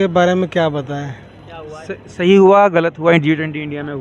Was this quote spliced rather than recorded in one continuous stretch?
no; 0 cuts

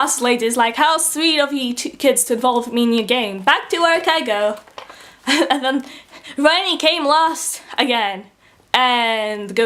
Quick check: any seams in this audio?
no; 0 cuts

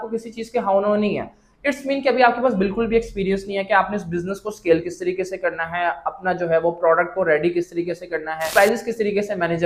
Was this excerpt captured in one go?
yes; 0 cuts

